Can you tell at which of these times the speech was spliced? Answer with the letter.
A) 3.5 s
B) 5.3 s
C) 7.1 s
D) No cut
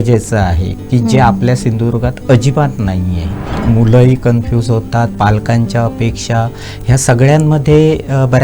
A